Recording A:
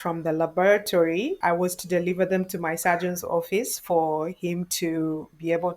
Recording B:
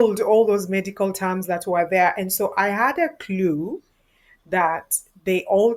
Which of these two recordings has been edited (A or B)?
A